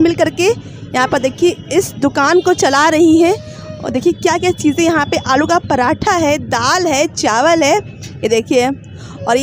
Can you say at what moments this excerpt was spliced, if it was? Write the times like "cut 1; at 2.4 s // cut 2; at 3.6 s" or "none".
none